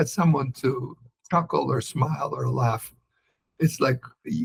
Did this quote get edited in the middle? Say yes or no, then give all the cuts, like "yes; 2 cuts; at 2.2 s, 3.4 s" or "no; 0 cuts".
no; 0 cuts